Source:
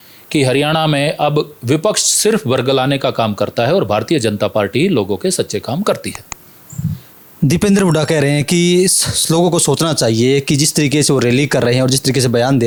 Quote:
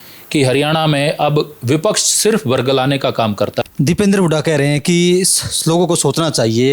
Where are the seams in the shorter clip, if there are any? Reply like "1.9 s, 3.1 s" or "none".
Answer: 3.6 s